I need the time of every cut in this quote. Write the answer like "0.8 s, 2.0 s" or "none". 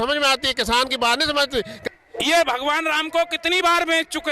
1.7 s

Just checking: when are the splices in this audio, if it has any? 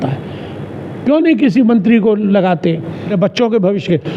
3.1 s

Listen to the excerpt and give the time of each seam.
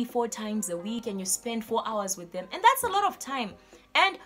0.9 s

